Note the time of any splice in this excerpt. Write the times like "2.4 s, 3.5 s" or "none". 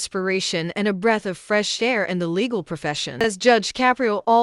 3.2 s